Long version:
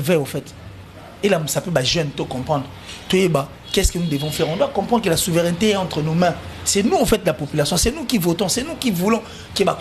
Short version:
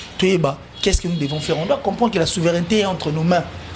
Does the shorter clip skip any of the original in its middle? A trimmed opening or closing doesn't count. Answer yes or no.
no